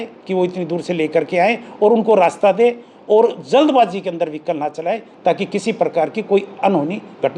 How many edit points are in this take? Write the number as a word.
zero